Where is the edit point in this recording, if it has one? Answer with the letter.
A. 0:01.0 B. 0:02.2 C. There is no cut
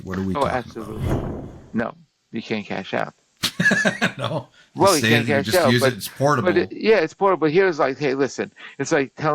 A